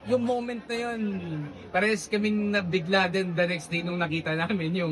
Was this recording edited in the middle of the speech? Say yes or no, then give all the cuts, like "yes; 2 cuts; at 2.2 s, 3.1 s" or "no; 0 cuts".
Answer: no; 0 cuts